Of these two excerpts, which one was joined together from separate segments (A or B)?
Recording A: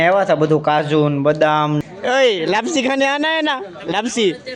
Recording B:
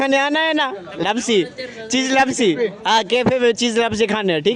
A